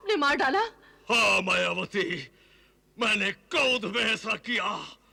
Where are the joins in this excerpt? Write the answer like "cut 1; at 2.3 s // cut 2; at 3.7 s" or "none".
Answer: none